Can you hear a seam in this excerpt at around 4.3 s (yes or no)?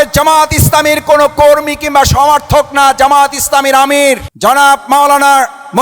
yes